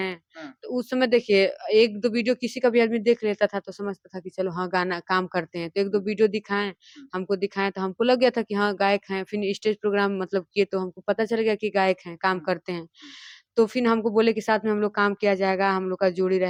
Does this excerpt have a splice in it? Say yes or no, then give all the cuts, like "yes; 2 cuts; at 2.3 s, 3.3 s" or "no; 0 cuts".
no; 0 cuts